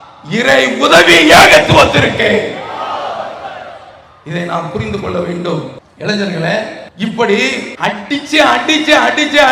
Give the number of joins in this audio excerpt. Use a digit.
3